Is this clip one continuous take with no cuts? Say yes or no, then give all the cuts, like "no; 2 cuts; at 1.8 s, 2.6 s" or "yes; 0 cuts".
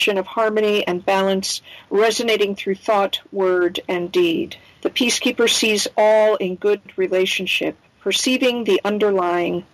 no; 1 cut; at 6.9 s